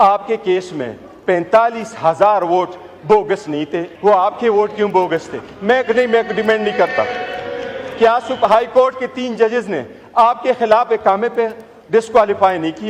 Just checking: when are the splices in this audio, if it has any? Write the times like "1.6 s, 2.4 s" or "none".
3.8 s